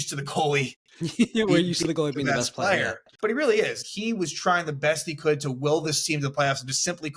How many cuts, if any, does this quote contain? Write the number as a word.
two